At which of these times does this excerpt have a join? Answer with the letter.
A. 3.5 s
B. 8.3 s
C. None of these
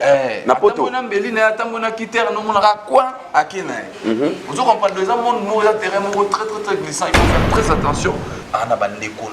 B